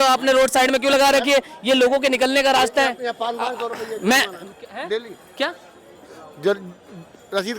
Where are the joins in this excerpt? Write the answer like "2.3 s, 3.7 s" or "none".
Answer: none